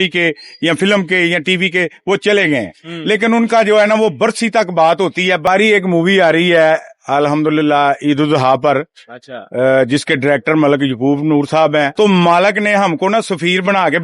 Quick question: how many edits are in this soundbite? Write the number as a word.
two